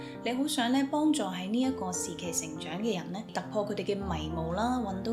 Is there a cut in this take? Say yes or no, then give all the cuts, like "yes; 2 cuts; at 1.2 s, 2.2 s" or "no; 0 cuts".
yes; 1 cut; at 3.3 s